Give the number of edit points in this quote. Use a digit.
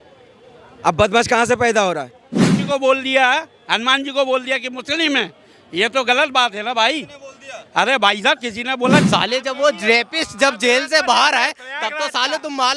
2